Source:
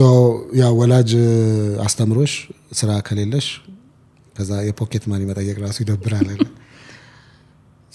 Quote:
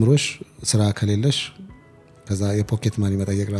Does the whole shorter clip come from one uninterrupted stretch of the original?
yes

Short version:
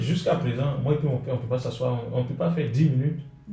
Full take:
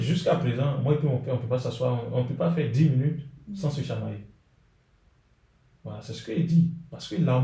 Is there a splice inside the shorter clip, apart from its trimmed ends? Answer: no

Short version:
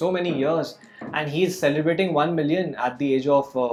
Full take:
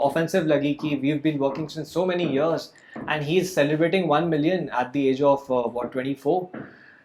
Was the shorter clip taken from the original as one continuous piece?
yes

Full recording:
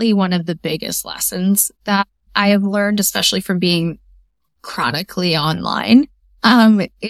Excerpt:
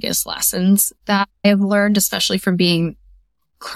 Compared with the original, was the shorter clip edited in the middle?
yes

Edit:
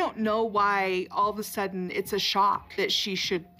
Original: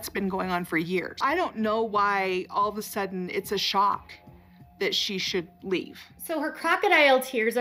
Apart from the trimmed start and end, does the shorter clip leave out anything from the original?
yes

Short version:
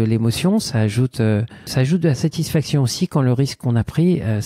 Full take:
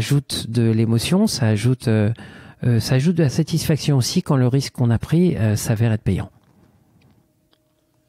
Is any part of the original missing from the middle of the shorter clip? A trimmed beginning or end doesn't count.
yes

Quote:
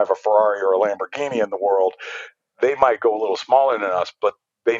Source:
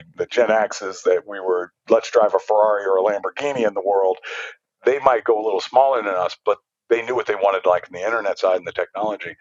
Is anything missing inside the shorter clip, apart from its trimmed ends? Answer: no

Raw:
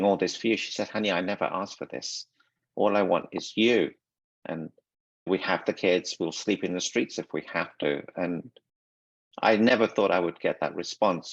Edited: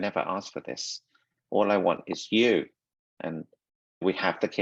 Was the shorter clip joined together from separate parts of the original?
no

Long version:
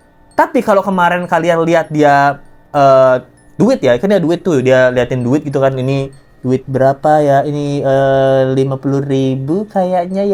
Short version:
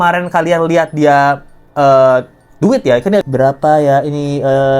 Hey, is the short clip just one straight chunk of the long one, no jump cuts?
no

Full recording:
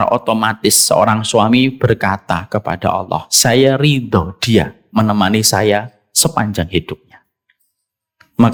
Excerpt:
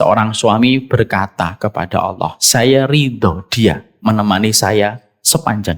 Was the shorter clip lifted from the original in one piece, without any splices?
yes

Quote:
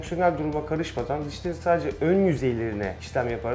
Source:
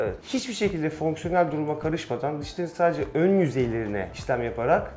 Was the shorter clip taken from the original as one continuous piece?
yes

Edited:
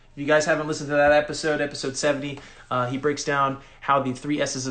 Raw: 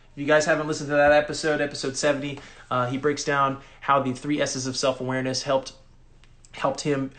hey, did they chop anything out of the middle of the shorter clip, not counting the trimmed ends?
no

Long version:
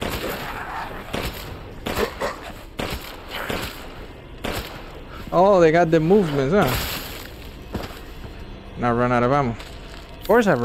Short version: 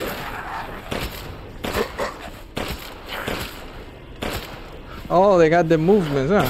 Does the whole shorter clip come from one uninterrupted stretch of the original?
yes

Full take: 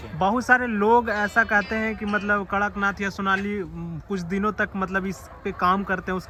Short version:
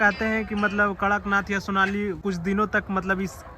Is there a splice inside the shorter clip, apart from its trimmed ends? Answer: yes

